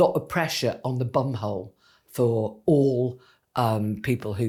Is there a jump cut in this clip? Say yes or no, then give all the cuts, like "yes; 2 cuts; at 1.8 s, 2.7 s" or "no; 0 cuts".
no; 0 cuts